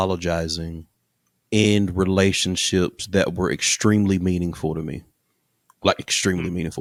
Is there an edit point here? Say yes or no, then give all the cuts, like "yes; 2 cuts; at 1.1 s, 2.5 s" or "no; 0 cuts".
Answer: no; 0 cuts